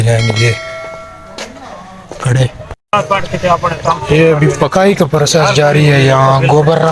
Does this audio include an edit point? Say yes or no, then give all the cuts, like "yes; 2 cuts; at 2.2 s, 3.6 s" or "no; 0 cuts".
yes; 1 cut; at 2.8 s